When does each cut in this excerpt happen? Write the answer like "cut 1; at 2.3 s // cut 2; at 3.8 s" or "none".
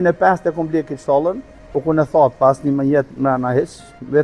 none